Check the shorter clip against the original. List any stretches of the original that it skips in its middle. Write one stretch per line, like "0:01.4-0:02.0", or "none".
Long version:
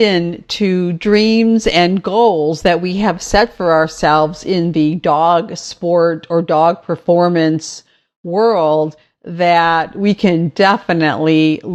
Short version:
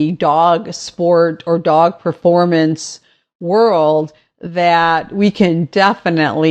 none